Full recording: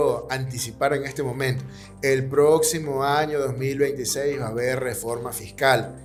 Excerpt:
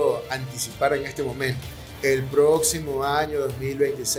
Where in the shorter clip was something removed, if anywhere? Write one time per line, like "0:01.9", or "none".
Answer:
none